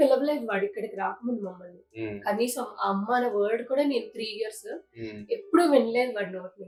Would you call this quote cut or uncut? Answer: uncut